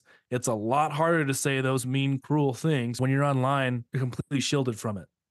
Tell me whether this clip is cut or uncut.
cut